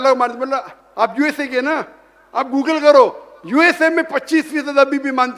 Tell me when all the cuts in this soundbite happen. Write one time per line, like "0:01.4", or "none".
none